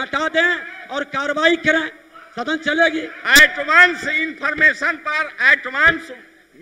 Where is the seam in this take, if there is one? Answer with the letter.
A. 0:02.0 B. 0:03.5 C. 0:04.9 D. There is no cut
D